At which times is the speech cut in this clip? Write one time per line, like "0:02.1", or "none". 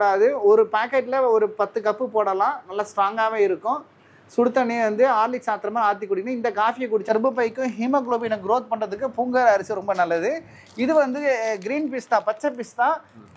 0:07.1